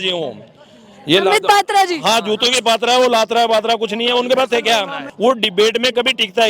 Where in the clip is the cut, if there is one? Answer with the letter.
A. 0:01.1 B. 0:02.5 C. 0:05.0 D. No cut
C